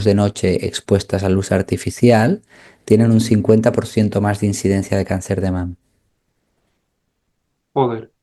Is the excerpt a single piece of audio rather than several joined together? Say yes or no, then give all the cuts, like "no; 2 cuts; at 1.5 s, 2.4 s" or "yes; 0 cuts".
yes; 0 cuts